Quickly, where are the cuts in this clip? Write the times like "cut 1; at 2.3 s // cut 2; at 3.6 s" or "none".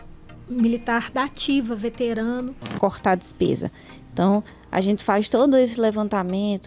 cut 1; at 2.7 s